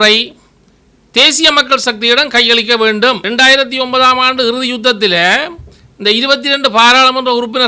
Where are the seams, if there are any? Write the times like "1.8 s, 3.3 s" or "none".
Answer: 3.2 s